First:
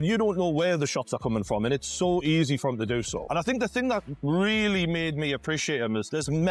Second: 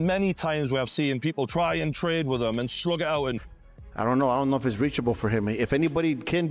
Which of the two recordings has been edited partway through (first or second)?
second